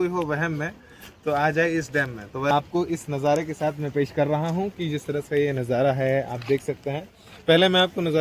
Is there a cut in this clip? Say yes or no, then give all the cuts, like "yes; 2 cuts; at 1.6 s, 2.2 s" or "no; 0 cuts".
yes; 1 cut; at 2.5 s